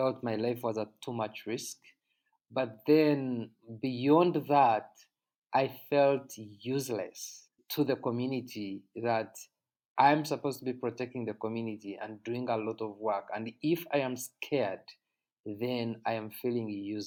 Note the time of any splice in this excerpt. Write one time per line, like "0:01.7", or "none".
none

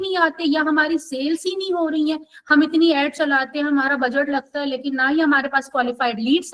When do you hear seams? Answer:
none

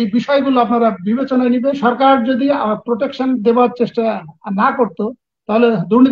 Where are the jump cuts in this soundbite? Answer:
0:01.8

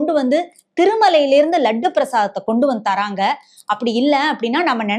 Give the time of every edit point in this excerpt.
none

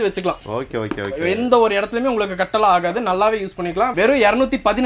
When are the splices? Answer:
none

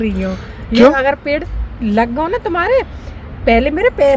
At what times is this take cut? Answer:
none

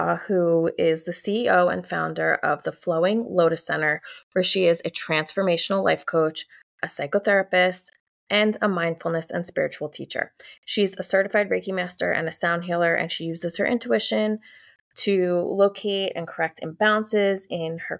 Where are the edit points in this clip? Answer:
none

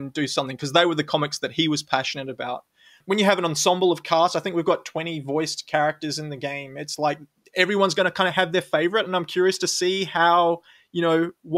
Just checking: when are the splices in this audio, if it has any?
0:03.0

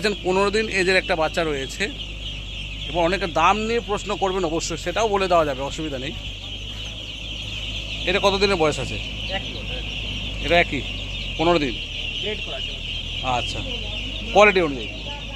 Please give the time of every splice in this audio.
none

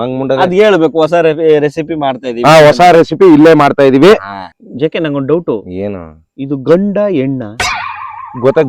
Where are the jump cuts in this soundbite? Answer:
0:04.5

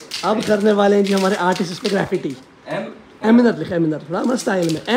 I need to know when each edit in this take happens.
none

